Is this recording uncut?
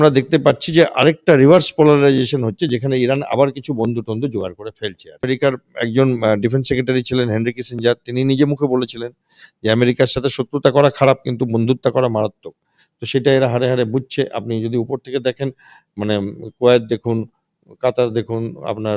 no; 1 cut; at 5.2 s

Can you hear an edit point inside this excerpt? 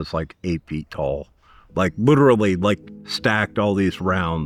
no; 0 cuts

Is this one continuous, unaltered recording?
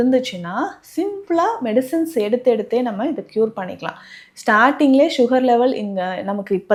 yes; 0 cuts

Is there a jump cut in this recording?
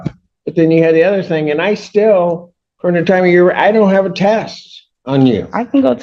no; 0 cuts

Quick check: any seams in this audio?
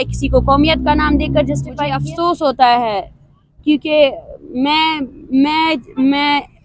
yes; 1 cut; at 2.1 s

